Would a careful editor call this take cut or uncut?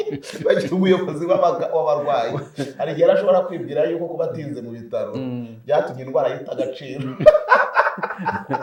uncut